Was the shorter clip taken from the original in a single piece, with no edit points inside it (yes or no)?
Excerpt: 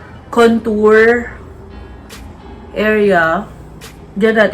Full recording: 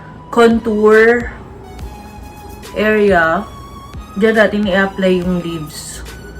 yes